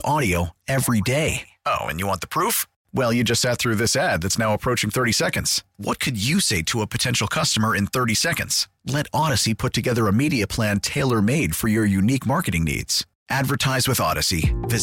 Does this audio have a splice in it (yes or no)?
no